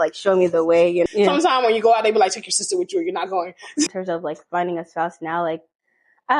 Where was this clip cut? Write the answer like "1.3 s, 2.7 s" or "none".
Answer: 1.1 s, 3.9 s